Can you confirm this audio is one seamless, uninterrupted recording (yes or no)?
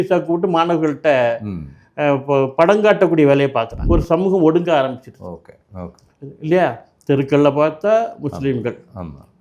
no